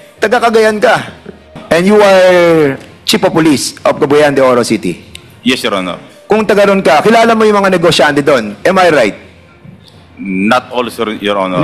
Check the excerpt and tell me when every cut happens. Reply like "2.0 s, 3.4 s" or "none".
1.5 s